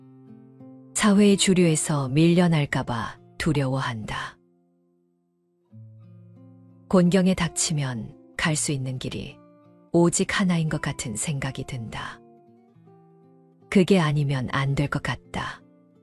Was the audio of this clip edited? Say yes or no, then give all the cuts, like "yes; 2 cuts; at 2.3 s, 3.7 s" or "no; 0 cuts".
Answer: yes; 1 cut; at 0.9 s